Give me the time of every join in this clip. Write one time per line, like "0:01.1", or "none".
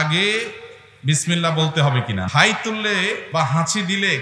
0:02.3
0:03.2